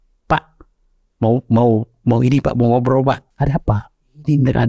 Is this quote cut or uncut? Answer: cut